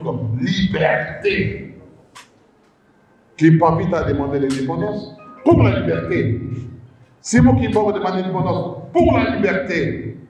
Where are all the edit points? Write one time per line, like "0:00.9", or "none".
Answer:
none